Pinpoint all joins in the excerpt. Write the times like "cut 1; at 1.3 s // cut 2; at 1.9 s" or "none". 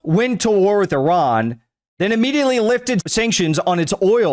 cut 1; at 3.0 s